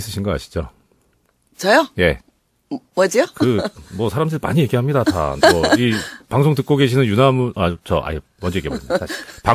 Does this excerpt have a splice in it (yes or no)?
yes